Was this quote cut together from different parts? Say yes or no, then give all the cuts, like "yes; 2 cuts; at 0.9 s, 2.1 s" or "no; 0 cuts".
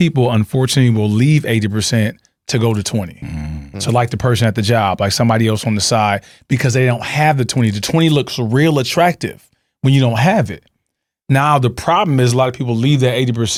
no; 0 cuts